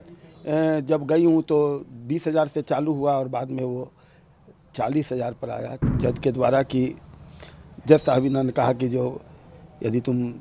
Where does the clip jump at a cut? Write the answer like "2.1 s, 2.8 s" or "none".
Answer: 5.9 s